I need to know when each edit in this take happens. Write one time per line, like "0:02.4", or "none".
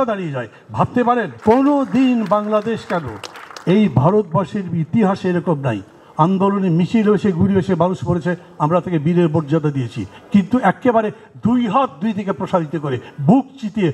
0:01.3

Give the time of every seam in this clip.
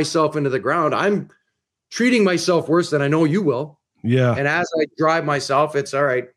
none

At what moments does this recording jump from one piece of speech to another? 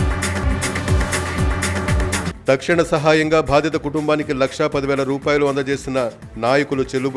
0:02.2

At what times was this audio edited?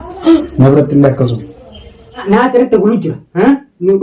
0:02.2

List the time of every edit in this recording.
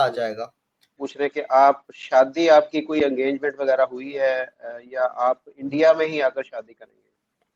0:01.1

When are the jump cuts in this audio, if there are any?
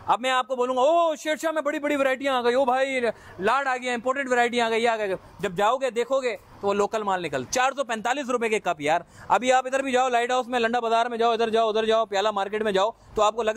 0:07.4

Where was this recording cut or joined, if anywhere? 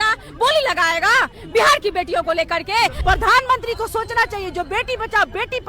0:03.0

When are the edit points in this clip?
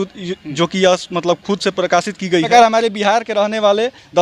0:02.5

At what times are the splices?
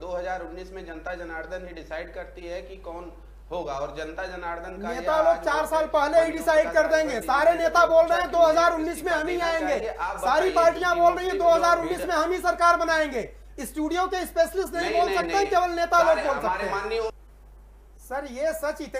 0:17.1

